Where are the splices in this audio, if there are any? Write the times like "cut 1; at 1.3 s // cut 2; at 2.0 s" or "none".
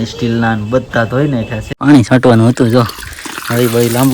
cut 1; at 1.7 s

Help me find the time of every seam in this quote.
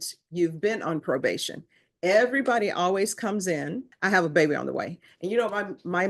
cut 1; at 3.9 s

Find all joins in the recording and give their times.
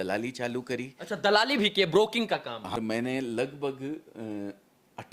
cut 1; at 2.7 s

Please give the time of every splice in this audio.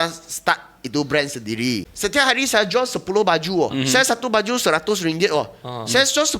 cut 1; at 1.9 s // cut 2; at 3.7 s

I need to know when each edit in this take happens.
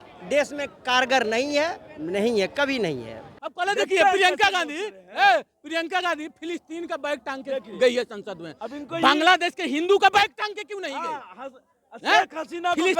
cut 1; at 3.3 s

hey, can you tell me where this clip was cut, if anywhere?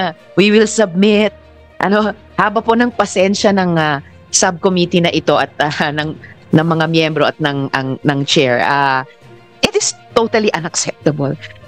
none

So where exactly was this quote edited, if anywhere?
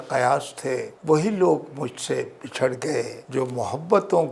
cut 1; at 0.9 s // cut 2; at 3.2 s

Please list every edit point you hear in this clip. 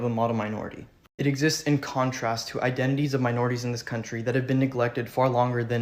none

